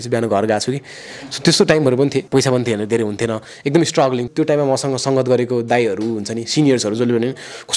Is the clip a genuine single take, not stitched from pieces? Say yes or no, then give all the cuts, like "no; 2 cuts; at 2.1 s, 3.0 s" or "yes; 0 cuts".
no; 2 cuts; at 2.2 s, 4.2 s